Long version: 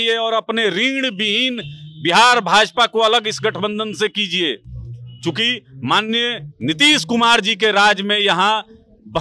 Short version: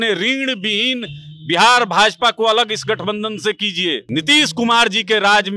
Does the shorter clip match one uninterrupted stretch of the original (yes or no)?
no